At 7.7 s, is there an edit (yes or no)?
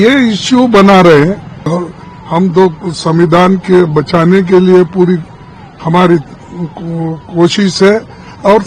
no